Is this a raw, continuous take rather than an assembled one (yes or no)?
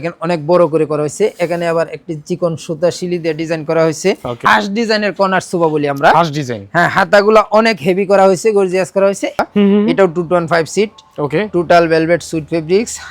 no